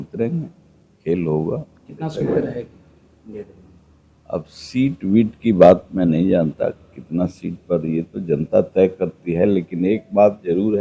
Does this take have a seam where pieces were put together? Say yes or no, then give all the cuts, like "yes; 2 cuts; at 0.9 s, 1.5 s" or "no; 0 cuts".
no; 0 cuts